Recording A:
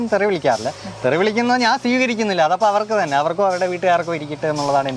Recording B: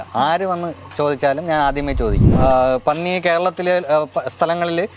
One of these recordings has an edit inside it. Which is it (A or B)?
B